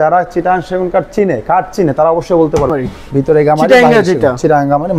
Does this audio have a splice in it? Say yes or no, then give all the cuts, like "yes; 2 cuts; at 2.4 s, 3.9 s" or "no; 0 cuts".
yes; 1 cut; at 2.7 s